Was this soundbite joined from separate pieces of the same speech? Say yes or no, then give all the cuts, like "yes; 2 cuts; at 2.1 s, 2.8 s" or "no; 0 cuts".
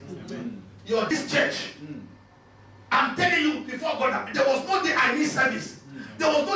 yes; 1 cut; at 1.1 s